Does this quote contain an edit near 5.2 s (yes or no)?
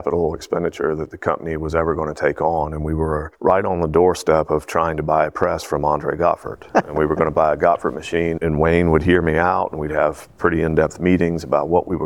no